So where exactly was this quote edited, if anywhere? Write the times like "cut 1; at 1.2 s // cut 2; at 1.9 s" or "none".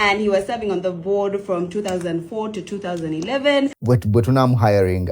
cut 1; at 3.8 s